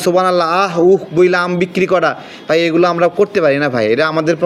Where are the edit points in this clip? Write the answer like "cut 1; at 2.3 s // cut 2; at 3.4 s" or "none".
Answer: none